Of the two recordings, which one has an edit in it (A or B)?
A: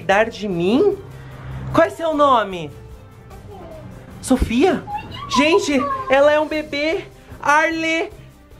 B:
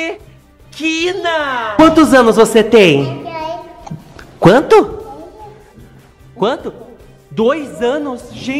B